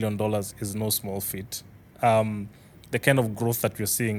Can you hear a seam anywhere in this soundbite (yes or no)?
no